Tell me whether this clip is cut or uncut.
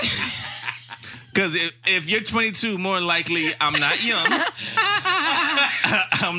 uncut